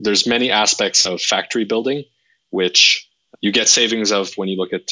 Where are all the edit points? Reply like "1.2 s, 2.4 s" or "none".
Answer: 3.2 s

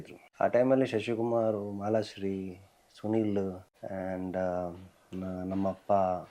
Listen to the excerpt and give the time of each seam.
none

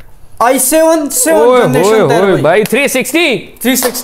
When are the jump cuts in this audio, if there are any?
none

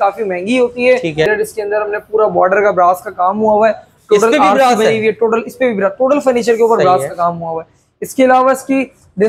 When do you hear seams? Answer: 1.3 s

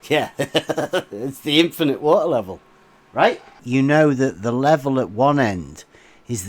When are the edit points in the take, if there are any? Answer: 3.6 s

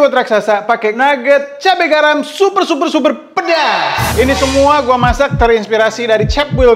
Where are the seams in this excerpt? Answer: 1.0 s

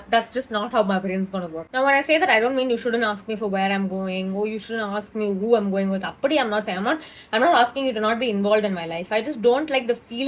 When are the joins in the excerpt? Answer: none

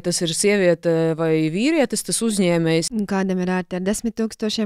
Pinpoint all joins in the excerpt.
2.9 s

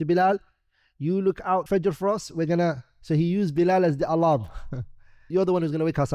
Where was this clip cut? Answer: 1.6 s, 5.3 s

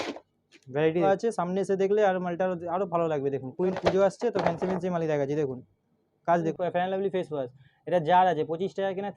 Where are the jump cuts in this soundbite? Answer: 1.1 s, 3.7 s, 6.5 s

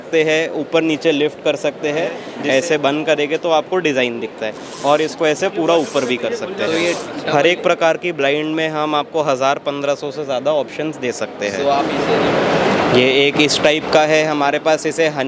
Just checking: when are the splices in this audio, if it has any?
2.3 s, 7.1 s, 12.0 s

